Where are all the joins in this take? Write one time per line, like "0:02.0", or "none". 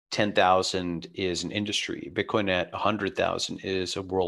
none

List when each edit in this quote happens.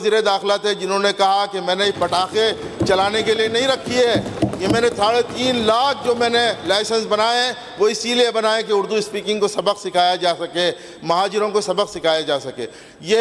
none

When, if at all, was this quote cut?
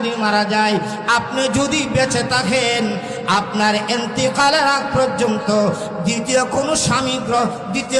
none

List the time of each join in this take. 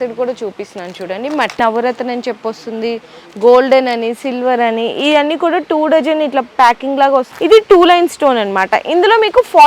0:01.6
0:07.3

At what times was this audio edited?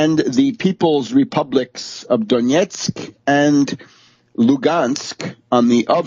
0:02.5

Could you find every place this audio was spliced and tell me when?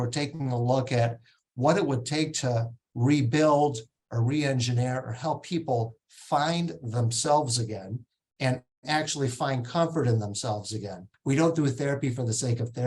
0:11.1

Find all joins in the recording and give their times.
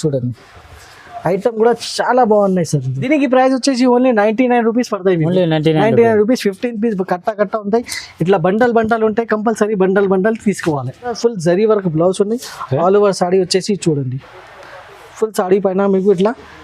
0:03.0
0:11.1

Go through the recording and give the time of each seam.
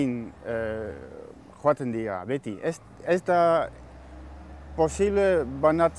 none

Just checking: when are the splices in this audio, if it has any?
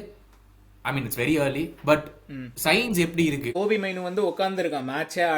0:03.5

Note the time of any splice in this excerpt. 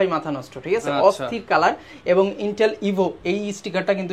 none

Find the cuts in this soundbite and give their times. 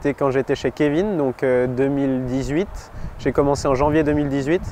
none

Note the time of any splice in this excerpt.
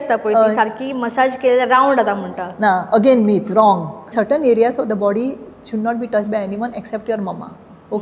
0:04.1

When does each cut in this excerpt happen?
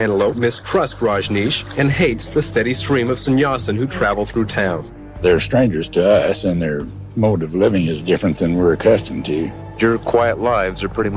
0:05.0
0:09.6

